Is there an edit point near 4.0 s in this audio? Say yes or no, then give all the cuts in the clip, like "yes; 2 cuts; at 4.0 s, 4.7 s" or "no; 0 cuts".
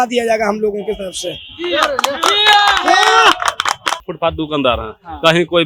yes; 1 cut; at 4.0 s